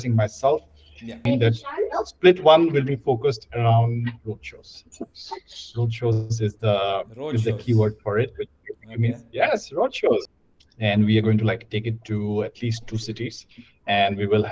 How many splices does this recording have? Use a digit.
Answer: 2